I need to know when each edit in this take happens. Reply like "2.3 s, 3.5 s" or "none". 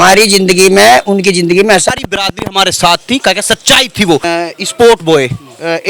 1.9 s, 4.2 s